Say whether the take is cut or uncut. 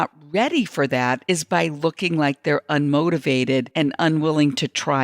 cut